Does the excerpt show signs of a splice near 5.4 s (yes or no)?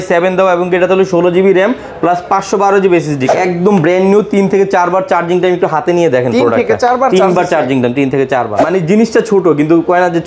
no